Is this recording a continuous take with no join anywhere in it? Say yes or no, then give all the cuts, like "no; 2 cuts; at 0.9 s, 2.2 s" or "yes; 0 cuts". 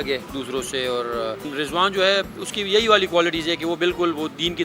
yes; 0 cuts